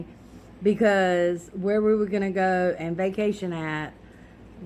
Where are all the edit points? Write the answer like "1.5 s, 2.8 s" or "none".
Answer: none

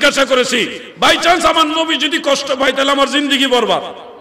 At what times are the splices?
none

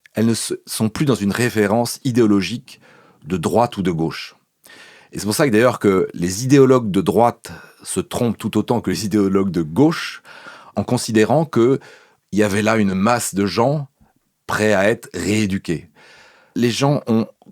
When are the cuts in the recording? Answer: 10.7 s, 16.5 s

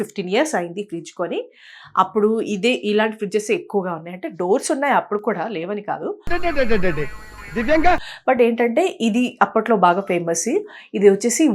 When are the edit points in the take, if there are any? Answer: none

